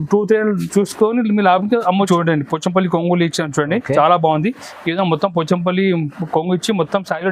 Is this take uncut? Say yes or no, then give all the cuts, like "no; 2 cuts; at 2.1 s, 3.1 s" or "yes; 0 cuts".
no; 1 cut; at 2.1 s